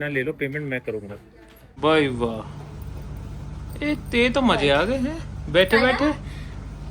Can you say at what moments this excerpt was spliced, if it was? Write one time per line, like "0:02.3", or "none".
0:01.7